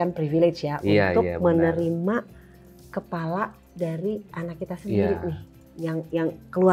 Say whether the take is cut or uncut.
uncut